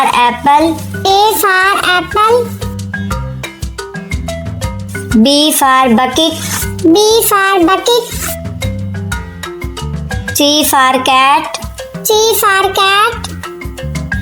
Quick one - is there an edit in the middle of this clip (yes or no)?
no